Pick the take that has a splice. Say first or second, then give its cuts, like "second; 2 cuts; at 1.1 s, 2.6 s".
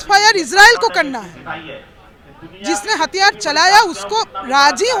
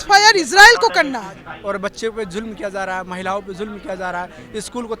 second; 1 cut; at 1.5 s